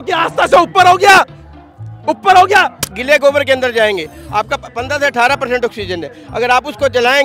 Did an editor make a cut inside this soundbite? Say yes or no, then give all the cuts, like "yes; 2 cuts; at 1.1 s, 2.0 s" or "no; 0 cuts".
yes; 1 cut; at 2.8 s